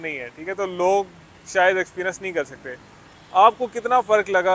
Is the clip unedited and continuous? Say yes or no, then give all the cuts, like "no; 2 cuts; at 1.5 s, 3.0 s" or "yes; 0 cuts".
yes; 0 cuts